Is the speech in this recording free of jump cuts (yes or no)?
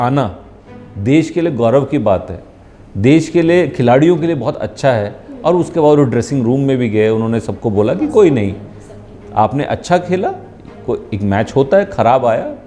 yes